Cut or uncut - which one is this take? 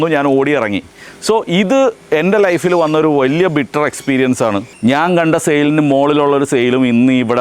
cut